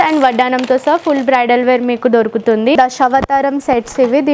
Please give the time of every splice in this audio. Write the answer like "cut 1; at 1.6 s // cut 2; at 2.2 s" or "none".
cut 1; at 2.8 s